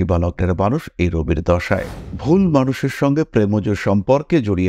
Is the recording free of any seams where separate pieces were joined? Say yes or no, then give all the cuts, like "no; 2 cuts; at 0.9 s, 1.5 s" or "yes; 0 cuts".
no; 1 cut; at 2.0 s